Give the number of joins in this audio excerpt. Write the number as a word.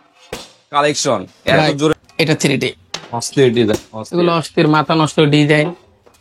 one